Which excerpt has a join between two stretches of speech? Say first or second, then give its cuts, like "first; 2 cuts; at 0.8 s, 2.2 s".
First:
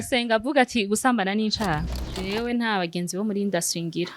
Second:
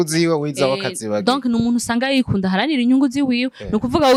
first; 1 cut; at 2.1 s